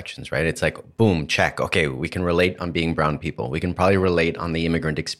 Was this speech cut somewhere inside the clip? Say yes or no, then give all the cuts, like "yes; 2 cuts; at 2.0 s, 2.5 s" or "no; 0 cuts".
no; 0 cuts